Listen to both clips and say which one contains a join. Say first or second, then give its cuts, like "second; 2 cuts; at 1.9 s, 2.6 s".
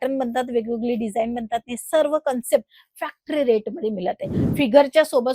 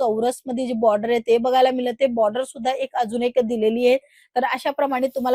first; 1 cut; at 4.4 s